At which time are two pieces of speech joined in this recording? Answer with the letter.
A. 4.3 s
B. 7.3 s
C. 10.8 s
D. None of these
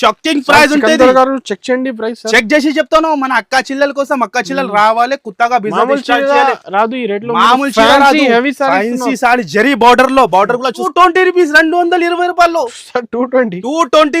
C